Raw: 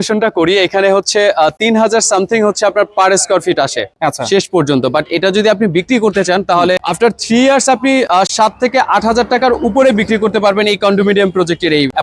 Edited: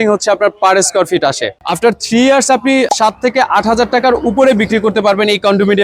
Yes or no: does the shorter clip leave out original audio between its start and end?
yes